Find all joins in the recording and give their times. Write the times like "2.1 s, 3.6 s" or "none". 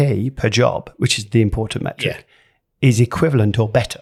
none

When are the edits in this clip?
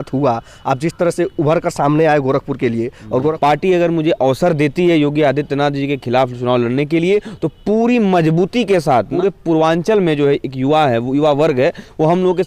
3.4 s, 9.1 s

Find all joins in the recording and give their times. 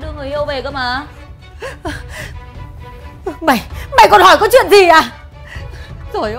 1.2 s

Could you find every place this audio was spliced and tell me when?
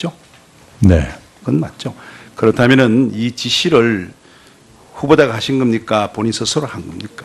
none

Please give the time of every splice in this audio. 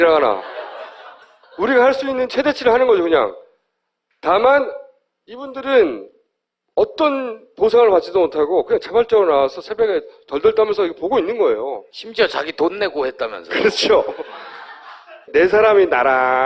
none

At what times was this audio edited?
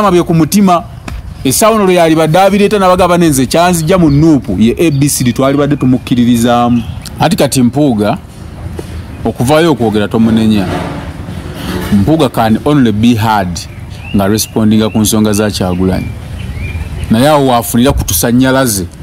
7.0 s

